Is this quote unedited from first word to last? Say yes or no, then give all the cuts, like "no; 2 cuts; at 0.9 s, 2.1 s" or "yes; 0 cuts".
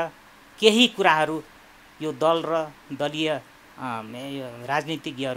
yes; 0 cuts